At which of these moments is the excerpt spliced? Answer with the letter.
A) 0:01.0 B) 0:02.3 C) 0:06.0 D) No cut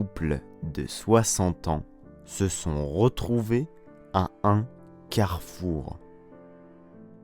C